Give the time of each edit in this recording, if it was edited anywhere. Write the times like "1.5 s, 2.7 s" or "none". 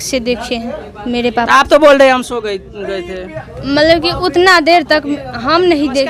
none